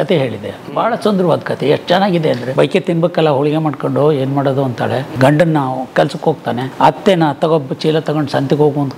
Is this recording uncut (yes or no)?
no